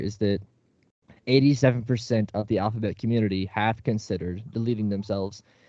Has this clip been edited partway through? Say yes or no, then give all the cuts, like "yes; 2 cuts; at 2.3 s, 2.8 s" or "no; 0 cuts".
no; 0 cuts